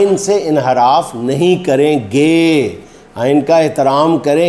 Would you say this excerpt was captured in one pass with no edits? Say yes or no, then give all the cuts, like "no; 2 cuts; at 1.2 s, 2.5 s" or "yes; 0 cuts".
yes; 0 cuts